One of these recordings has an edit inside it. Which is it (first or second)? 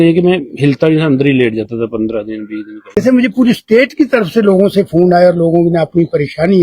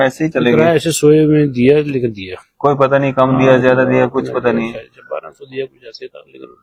first